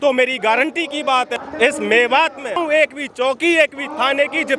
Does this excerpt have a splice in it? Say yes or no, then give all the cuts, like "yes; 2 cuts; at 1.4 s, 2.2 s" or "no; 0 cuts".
yes; 2 cuts; at 1.5 s, 2.6 s